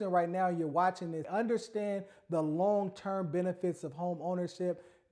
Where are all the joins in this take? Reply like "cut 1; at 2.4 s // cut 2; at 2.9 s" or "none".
cut 1; at 1.2 s